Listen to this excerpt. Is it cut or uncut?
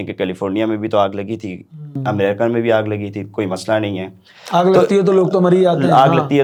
uncut